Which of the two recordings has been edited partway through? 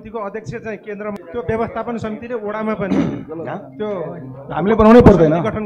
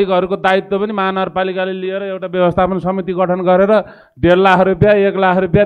first; 1 cut; at 1.2 s

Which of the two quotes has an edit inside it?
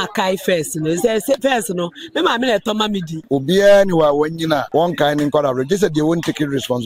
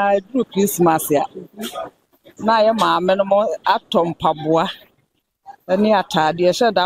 first; 2 cuts; at 3.1 s, 4.7 s

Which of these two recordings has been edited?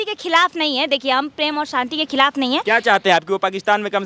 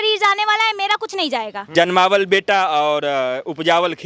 second; 1 cut; at 1.6 s

